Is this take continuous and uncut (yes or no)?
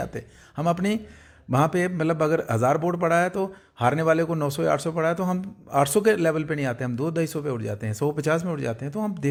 yes